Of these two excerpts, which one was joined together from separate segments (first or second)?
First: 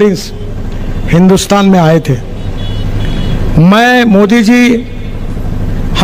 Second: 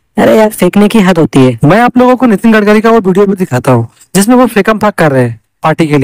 second